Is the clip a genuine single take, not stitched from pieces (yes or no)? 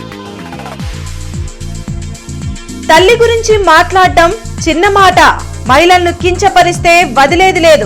yes